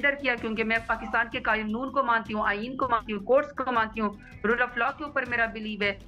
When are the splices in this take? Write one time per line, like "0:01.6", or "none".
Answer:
none

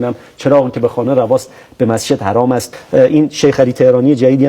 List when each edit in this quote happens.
0:02.7

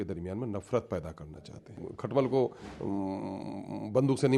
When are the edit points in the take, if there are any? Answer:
0:01.9

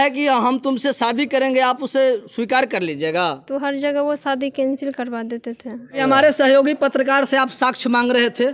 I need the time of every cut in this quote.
0:06.0

